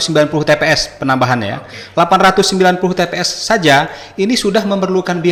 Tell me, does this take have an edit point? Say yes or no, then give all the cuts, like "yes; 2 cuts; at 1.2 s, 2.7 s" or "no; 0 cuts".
no; 0 cuts